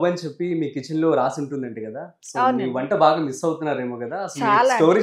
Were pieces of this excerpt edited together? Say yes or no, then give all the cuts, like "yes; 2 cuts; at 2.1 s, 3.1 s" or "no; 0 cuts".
no; 0 cuts